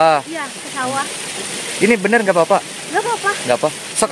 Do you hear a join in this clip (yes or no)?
no